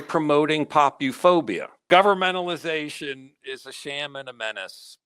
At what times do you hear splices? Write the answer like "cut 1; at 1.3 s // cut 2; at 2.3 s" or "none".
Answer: cut 1; at 1.9 s